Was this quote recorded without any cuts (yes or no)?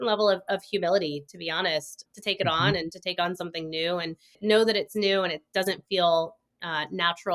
no